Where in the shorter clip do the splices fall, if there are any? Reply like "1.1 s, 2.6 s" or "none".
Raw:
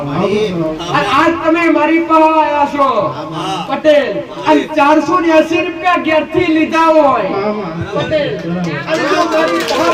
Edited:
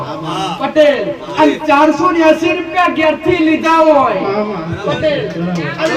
none